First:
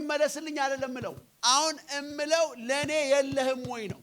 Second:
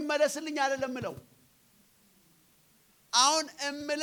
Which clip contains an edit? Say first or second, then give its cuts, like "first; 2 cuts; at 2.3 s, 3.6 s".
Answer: first; 1 cut; at 1.3 s